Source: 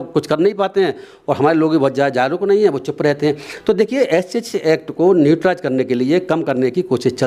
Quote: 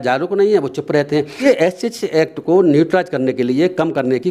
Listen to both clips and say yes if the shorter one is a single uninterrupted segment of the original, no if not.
no